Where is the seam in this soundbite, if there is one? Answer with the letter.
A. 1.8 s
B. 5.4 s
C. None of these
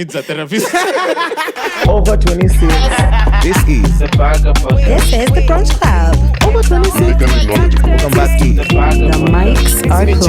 A